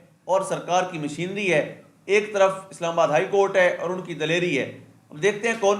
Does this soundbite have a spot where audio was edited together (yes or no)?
no